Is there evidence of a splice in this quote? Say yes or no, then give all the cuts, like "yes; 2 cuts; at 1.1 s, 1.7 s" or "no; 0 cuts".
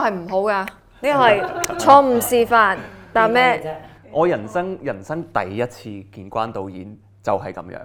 no; 0 cuts